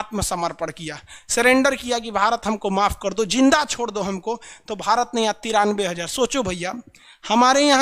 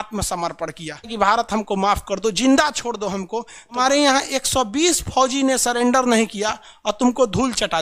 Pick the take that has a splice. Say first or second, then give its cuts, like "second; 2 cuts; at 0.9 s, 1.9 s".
second; 2 cuts; at 1.1 s, 3.8 s